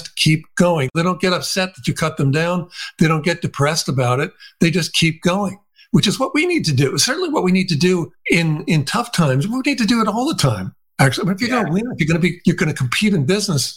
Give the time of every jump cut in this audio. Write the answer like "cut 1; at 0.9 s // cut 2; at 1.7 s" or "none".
cut 1; at 0.9 s // cut 2; at 8.1 s // cut 3; at 12.4 s